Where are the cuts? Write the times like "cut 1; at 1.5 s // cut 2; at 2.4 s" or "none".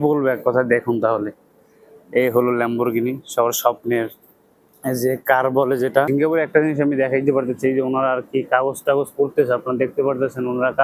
cut 1; at 6.1 s